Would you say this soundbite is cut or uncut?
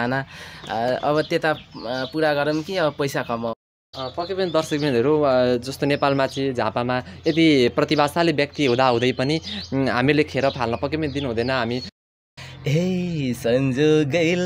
cut